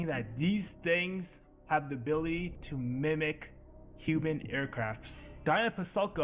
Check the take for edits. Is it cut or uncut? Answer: cut